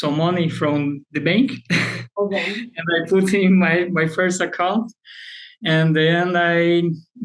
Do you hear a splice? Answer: no; 0 cuts

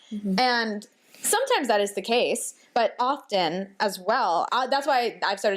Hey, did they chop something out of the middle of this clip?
yes; 2 cuts; at 3.0 s, 4.5 s

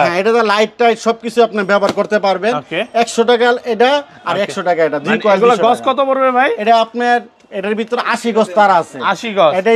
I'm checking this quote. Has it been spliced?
no; 0 cuts

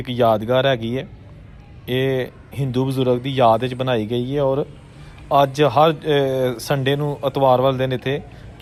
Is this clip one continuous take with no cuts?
yes; 0 cuts

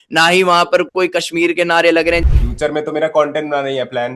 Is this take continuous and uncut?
no; 1 cut; at 2.2 s

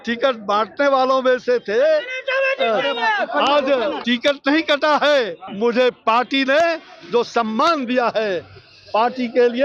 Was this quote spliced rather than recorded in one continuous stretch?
yes; 2 cuts; at 4.0 s, 5.4 s

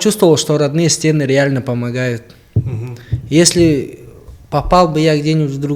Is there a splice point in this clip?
no; 0 cuts

